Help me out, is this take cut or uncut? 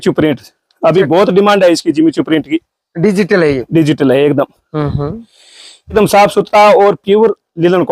cut